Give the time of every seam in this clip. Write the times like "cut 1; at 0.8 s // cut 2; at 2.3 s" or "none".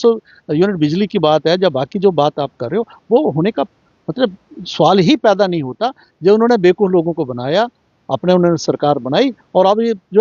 none